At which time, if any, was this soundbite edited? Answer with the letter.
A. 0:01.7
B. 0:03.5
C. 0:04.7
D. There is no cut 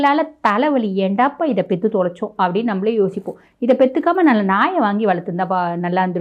D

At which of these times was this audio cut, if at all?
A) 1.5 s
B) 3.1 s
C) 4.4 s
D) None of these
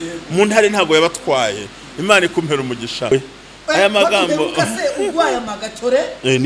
B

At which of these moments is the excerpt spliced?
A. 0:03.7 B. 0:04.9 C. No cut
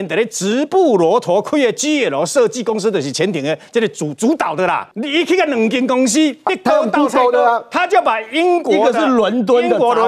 B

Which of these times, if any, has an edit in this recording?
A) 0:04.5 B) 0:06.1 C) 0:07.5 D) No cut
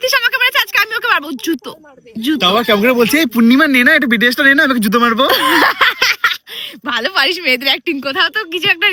D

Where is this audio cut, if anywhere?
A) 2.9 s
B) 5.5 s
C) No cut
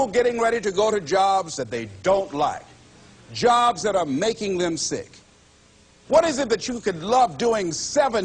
B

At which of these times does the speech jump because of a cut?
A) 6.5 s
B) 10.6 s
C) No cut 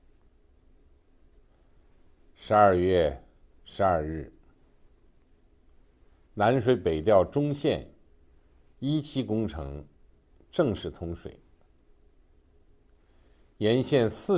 A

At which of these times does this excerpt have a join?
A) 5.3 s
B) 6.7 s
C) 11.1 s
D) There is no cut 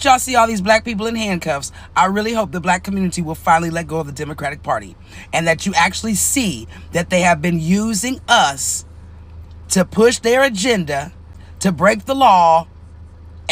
D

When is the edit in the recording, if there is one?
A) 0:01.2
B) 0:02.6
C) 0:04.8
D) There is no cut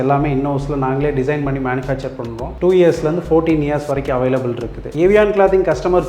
C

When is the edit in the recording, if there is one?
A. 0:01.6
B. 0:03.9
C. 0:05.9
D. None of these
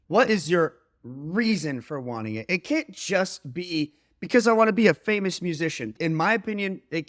C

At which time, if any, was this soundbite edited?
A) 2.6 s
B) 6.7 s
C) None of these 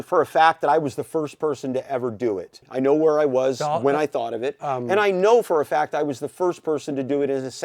A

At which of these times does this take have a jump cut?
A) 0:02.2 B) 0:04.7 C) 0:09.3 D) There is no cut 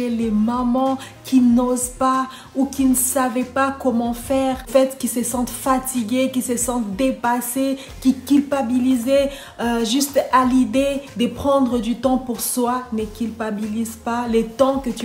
B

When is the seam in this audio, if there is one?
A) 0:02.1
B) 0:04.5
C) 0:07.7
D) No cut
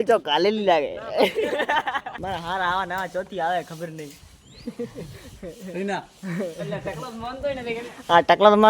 A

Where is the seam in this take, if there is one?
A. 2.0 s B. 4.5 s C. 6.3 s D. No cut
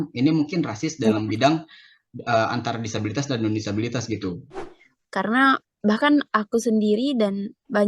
B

